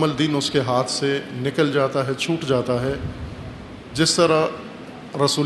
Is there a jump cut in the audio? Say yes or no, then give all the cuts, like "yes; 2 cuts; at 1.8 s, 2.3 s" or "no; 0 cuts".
no; 0 cuts